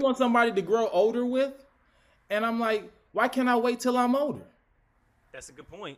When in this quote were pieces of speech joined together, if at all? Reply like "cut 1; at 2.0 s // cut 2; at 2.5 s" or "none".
none